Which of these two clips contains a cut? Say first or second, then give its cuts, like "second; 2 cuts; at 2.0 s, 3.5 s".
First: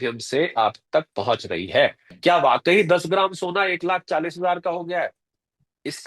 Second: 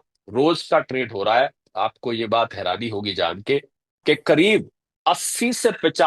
first; 1 cut; at 2.1 s